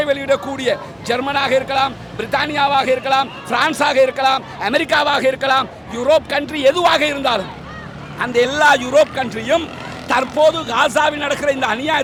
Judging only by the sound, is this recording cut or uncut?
uncut